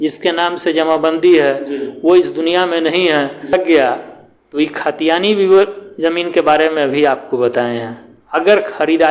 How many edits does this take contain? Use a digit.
1